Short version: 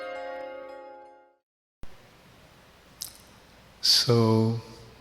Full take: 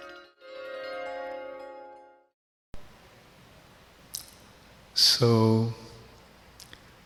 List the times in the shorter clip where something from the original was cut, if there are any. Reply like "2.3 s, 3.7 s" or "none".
1.9 s